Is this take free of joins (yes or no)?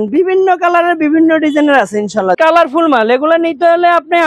no